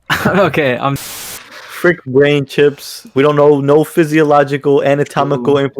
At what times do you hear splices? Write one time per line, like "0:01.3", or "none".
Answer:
0:01.0